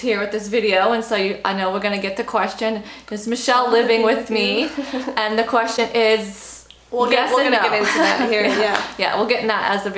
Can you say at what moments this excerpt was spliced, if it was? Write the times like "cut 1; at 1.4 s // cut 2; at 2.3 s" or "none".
none